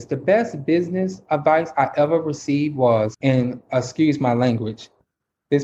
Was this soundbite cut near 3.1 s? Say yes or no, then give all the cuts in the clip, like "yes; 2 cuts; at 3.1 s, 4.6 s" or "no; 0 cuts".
yes; 1 cut; at 3.1 s